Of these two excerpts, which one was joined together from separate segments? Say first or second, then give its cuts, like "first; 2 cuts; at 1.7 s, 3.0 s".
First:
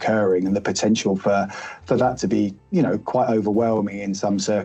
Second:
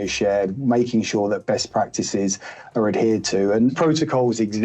second; 1 cut; at 3.7 s